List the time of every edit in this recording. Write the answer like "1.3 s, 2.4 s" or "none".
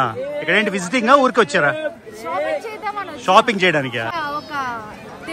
4.1 s